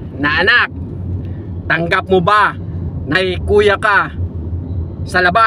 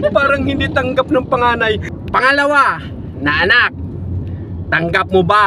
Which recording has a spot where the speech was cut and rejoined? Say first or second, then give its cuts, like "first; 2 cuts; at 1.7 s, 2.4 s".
second; 1 cut; at 1.9 s